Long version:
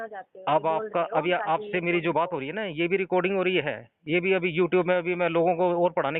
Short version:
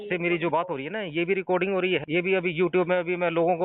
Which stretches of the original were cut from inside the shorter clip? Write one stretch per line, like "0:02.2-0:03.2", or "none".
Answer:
0:03.7-0:04.0